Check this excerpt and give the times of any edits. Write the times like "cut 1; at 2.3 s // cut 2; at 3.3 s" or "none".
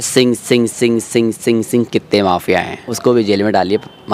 cut 1; at 2.9 s

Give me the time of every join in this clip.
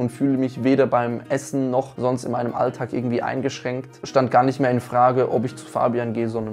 cut 1; at 4.0 s

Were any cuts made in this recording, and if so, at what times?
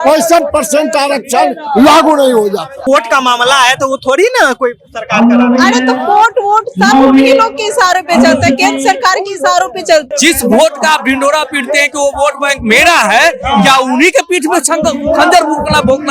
cut 1; at 2.9 s // cut 2; at 10.1 s

